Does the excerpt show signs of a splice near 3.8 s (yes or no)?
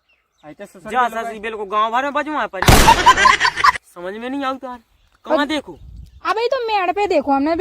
yes